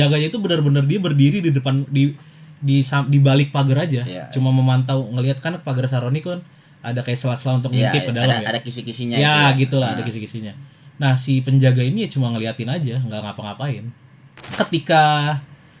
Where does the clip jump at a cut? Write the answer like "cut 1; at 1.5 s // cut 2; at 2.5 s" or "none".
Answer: cut 1; at 14.6 s